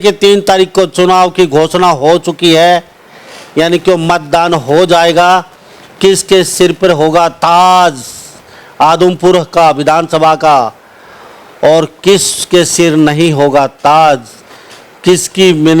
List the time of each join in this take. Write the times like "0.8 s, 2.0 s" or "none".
none